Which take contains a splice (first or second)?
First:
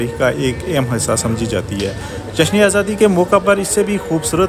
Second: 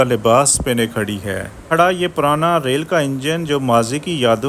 second